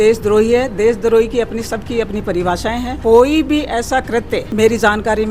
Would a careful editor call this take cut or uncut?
cut